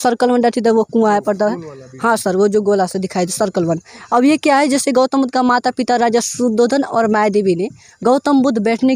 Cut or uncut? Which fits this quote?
uncut